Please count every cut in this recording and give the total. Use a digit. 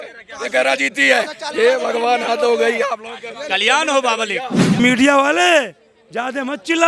1